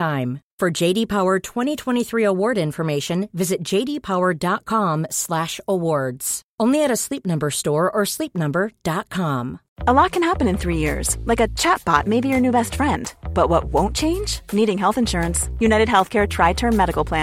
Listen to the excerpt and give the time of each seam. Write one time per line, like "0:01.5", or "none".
0:09.7